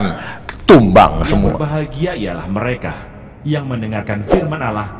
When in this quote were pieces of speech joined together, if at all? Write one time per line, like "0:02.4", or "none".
0:01.6